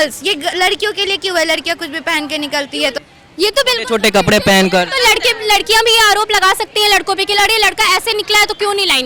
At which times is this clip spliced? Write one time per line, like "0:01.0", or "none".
0:03.0

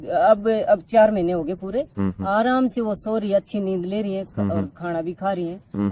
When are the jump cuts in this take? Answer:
none

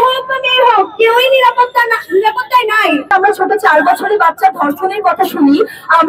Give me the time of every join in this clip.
0:03.1

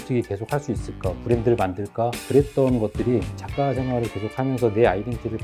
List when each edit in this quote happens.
0:02.2
0:03.4

